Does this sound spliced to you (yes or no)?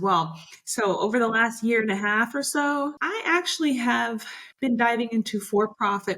yes